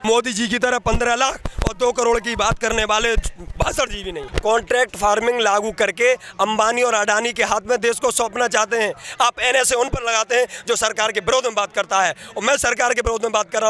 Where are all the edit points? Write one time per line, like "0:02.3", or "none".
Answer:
0:04.3
0:09.1